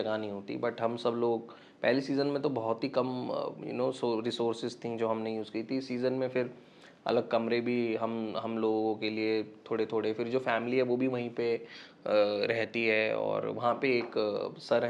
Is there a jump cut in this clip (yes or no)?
no